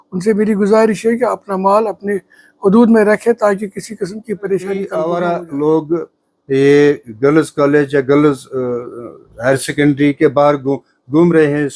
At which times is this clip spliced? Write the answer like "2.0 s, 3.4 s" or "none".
4.9 s